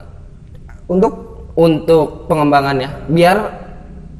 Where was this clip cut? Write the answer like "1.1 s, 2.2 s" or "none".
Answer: none